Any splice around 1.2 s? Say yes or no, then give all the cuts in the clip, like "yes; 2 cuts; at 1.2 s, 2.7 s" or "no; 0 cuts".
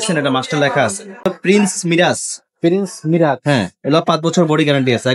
yes; 1 cut; at 1.2 s